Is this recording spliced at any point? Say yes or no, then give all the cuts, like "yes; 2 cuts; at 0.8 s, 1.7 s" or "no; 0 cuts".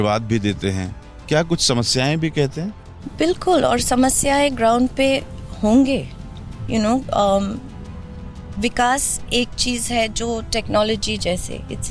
no; 0 cuts